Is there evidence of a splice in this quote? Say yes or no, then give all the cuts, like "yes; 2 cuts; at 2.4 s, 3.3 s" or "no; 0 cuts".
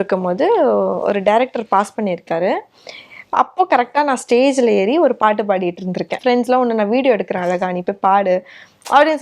yes; 1 cut; at 6.2 s